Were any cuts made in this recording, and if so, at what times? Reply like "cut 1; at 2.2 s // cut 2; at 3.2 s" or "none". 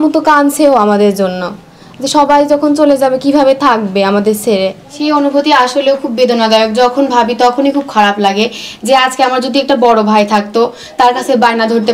cut 1; at 4.9 s